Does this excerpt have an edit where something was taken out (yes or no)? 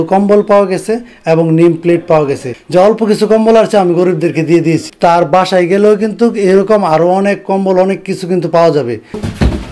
no